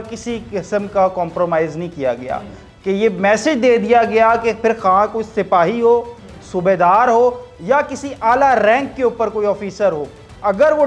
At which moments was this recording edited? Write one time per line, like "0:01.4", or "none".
none